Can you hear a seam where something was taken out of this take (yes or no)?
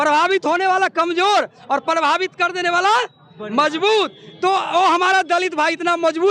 no